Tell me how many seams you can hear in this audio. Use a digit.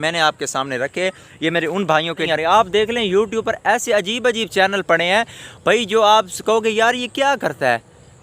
1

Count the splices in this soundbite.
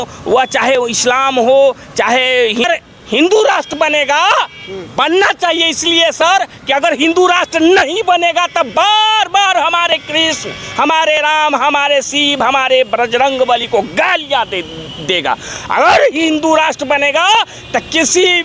1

